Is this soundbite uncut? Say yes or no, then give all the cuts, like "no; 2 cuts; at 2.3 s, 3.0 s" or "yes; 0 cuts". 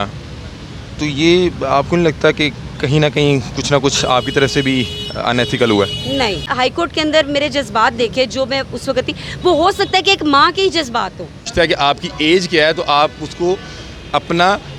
no; 2 cuts; at 6.5 s, 11.5 s